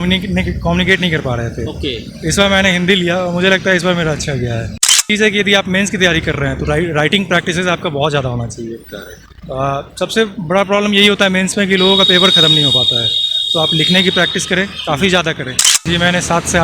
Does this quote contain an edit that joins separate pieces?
yes; 2 cuts; at 5.0 s, 15.7 s

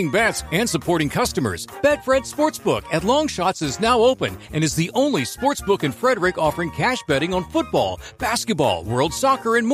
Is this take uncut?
yes; 0 cuts

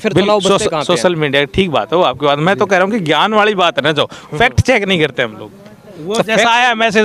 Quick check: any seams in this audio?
no; 0 cuts

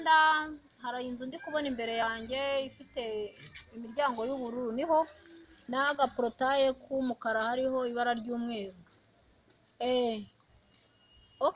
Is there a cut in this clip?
no; 0 cuts

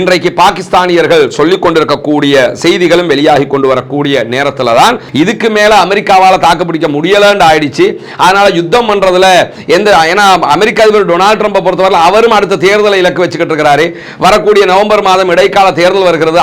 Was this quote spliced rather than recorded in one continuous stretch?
yes; 1 cut; at 5.0 s

